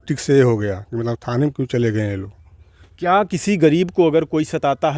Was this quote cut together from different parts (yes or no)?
no